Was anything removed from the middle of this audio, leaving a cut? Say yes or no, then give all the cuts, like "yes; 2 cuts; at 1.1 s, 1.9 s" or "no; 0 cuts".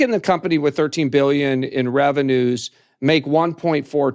no; 0 cuts